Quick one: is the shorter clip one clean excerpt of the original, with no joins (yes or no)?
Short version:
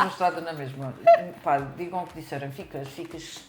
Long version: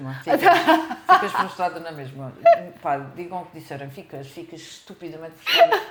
yes